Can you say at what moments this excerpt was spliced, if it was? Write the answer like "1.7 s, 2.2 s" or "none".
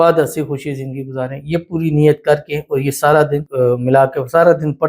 3.5 s